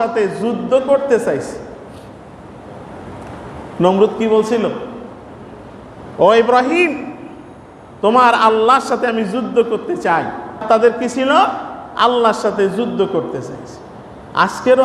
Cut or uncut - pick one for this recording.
cut